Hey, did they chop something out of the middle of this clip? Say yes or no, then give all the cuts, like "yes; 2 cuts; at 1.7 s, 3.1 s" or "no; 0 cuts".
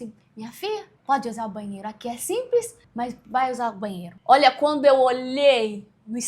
yes; 3 cuts; at 0.9 s, 2.8 s, 4.1 s